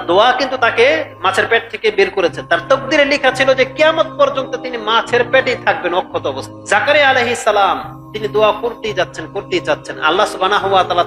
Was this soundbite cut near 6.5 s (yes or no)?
yes